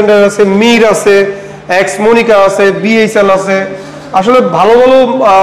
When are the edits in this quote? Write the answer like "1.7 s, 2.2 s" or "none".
none